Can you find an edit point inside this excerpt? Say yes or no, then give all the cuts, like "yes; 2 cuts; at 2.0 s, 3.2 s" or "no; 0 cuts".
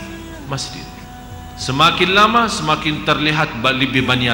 yes; 1 cut; at 1.1 s